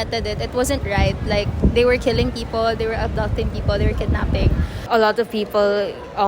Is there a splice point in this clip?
yes; 1 cut; at 4.7 s

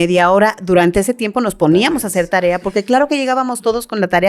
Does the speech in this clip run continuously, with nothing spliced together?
yes; 0 cuts

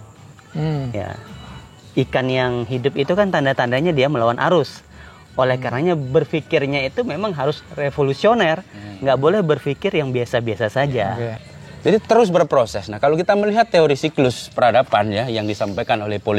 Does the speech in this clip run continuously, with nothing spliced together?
no; 1 cut; at 11.4 s

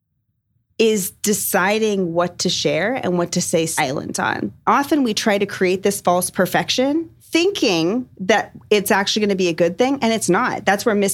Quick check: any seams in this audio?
yes; 2 cuts; at 4.6 s, 6.8 s

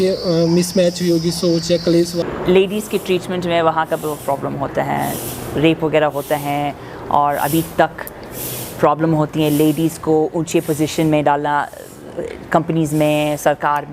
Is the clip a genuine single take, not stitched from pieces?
no; 1 cut; at 2.2 s

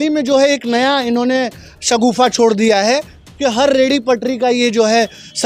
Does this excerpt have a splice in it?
no; 0 cuts

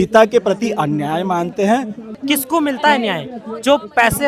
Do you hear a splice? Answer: yes; 1 cut; at 2.1 s

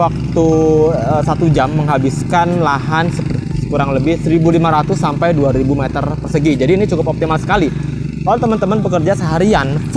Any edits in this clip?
no; 0 cuts

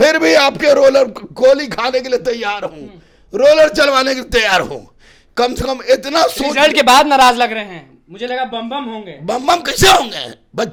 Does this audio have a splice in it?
no; 0 cuts

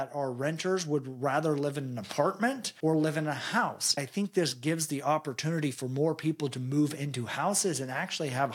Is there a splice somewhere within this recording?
yes; 2 cuts; at 2.7 s, 4.0 s

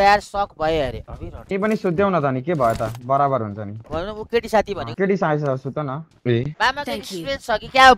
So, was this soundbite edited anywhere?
yes; 3 cuts; at 1.0 s, 3.8 s, 6.5 s

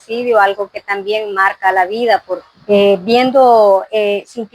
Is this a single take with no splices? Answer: no; 1 cut; at 2.5 s

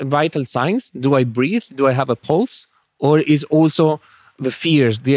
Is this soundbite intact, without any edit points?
yes; 0 cuts

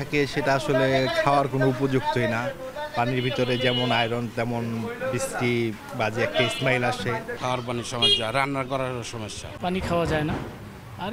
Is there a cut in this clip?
no; 0 cuts

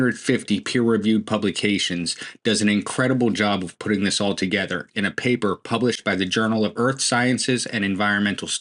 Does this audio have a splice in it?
no; 0 cuts

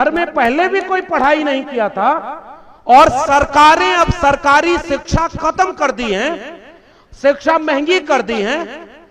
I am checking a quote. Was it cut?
no; 0 cuts

